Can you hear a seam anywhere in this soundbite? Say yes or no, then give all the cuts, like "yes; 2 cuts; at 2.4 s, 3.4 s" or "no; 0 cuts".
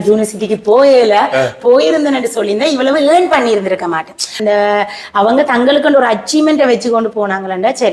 yes; 1 cut; at 4.3 s